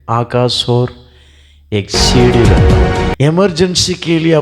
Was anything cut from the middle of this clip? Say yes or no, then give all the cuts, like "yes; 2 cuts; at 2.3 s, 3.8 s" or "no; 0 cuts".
yes; 1 cut; at 3.0 s